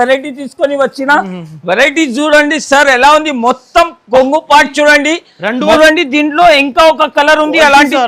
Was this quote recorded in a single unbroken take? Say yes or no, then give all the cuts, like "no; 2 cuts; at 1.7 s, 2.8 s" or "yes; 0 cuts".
no; 1 cut; at 5.8 s